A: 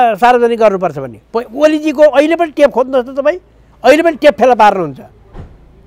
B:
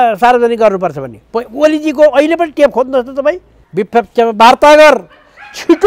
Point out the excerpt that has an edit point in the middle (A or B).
B